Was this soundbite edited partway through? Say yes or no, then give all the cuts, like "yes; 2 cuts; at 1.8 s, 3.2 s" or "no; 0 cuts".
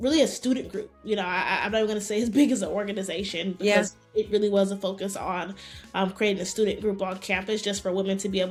no; 0 cuts